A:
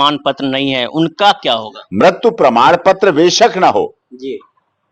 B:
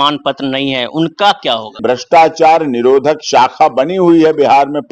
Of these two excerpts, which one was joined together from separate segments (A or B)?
B